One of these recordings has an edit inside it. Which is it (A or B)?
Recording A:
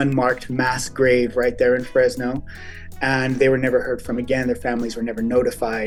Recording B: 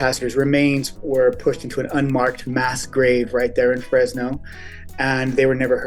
B